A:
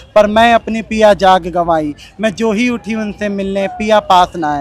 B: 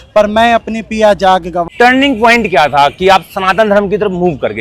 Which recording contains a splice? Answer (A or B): B